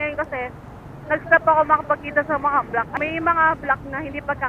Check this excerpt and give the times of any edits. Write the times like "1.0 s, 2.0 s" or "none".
2.9 s